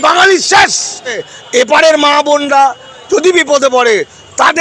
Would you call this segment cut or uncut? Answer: cut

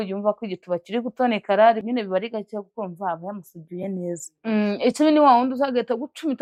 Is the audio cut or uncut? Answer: uncut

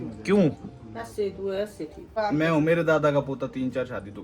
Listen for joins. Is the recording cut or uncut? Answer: cut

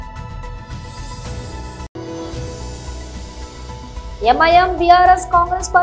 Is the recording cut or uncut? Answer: cut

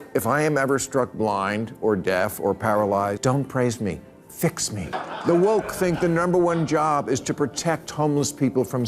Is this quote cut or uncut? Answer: cut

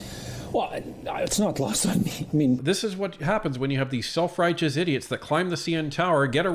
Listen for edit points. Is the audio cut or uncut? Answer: cut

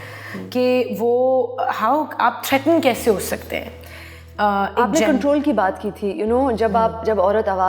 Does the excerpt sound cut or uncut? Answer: uncut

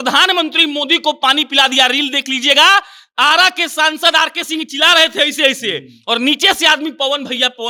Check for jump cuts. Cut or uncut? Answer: uncut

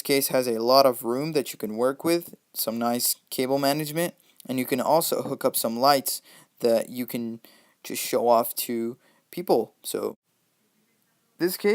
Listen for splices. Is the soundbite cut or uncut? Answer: cut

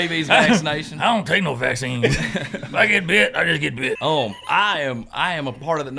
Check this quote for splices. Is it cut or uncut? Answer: cut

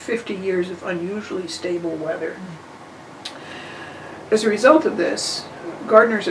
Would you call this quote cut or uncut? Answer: uncut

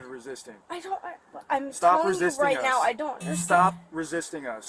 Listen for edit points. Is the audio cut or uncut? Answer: uncut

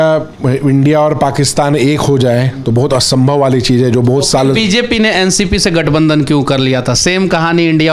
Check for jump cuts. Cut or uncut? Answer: uncut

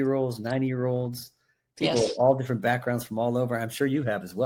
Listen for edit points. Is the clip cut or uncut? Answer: uncut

